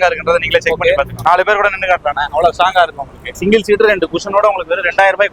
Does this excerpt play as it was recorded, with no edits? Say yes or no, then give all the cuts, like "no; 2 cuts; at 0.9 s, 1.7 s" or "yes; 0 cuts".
no; 2 cuts; at 1.2 s, 3.4 s